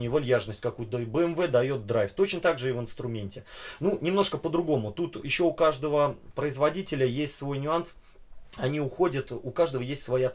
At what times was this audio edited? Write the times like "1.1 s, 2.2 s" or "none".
none